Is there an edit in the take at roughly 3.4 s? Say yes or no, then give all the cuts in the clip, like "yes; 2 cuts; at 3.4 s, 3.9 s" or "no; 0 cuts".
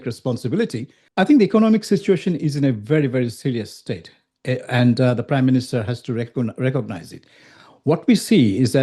no; 1 cut; at 1.0 s